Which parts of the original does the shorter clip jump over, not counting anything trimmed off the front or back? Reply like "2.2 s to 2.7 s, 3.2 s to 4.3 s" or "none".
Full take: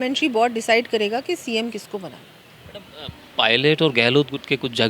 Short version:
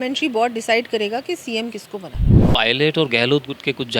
2.3 s to 3.1 s